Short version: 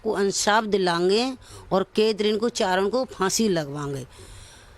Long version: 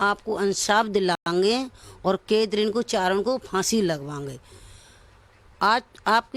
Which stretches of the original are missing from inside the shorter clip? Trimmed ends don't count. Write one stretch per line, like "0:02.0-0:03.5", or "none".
0:01.2-0:01.3